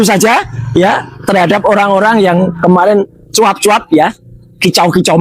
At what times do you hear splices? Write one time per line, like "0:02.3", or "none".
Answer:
none